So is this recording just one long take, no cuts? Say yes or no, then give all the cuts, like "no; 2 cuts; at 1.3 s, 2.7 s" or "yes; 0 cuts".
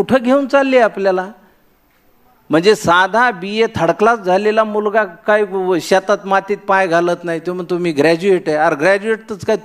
yes; 0 cuts